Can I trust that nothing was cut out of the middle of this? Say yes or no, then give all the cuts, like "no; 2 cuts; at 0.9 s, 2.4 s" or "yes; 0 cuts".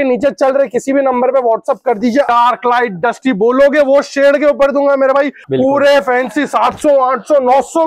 no; 2 cuts; at 2.3 s, 5.4 s